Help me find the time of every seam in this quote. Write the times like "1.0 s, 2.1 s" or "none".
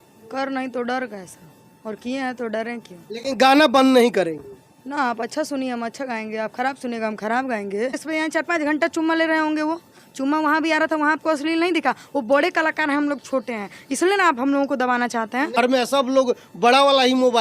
8.0 s, 15.6 s